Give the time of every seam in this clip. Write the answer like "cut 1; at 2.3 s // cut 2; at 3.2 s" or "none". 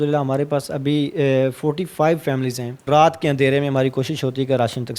cut 1; at 2.9 s